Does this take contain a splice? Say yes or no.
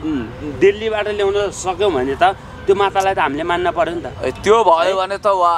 no